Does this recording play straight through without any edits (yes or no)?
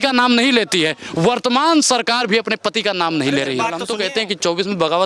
no